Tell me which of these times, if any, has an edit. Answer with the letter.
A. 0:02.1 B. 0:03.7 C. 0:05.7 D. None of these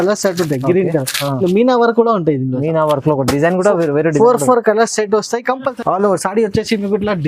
C